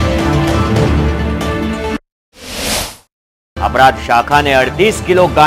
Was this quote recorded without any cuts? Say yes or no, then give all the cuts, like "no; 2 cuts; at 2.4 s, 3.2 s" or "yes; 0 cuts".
yes; 0 cuts